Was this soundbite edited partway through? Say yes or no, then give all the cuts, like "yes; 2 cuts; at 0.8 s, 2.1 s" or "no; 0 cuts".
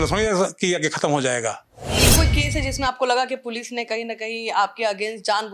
yes; 1 cut; at 2.1 s